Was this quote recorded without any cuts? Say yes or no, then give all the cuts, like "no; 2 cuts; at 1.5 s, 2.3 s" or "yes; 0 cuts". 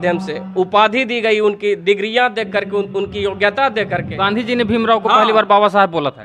yes; 0 cuts